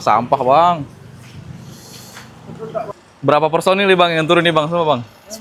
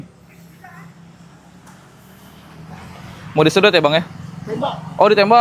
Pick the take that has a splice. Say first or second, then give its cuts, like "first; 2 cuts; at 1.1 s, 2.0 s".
first; 1 cut; at 3.0 s